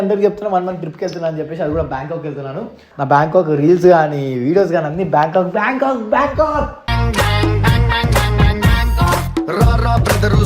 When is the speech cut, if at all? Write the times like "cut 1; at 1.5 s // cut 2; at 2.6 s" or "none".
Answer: cut 1; at 2.8 s